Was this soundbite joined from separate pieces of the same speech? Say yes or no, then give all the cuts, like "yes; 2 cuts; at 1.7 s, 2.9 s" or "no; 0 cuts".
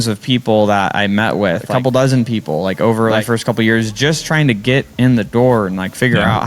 yes; 2 cuts; at 1.7 s, 3.2 s